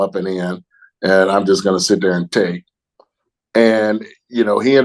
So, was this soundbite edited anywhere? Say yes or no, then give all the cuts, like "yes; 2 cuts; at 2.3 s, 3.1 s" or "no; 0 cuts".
no; 0 cuts